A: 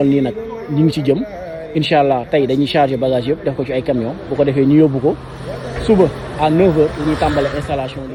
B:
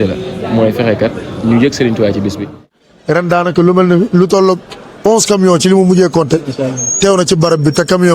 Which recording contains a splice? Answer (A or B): B